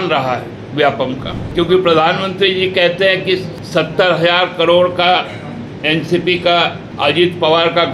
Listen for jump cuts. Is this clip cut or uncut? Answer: cut